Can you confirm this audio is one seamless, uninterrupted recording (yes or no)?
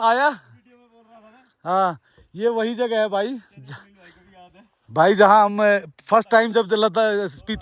yes